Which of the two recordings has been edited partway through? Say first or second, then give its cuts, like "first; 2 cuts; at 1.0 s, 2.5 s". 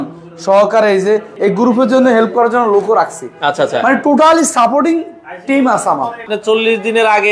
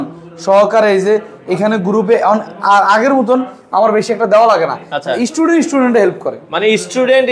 first; 2 cuts; at 1.3 s, 6.2 s